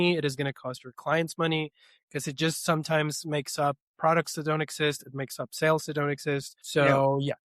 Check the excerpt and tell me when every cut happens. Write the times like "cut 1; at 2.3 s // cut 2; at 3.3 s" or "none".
cut 1; at 6.6 s